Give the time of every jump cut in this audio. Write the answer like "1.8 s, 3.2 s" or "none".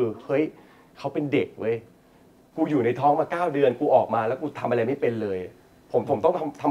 none